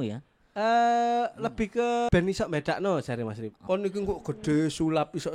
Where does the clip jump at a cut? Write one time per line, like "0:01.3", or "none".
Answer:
0:02.1
0:03.5

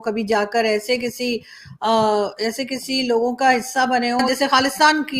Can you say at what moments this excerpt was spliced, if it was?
0:04.2

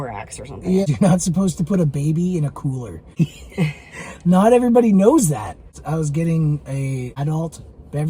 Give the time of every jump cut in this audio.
0:00.8
0:03.2
0:05.7
0:07.1

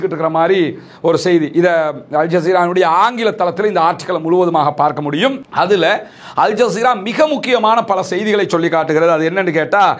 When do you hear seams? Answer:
none

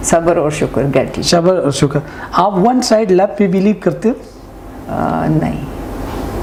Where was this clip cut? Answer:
none

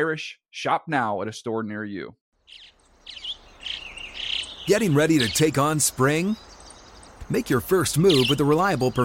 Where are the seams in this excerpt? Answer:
0:02.2

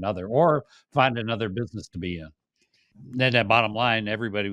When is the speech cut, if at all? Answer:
0:03.0

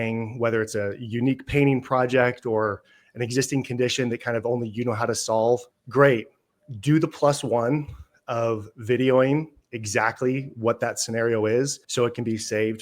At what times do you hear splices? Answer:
0:05.8
0:11.8

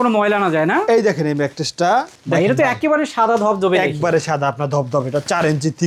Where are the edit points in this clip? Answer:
none

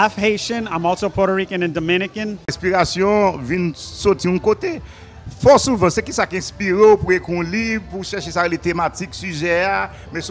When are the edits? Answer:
0:02.6

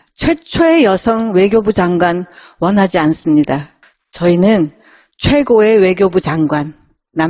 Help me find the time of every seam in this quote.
none

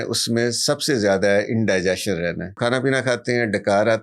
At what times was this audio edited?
0:02.6

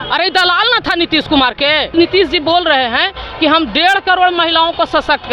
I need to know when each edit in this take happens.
0:01.9

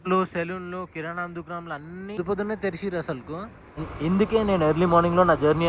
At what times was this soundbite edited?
0:03.8

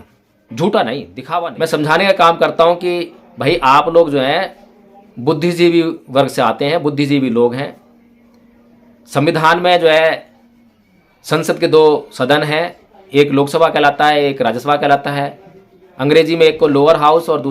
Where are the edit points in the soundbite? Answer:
0:01.2

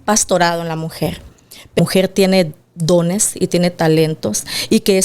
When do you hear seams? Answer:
0:01.8

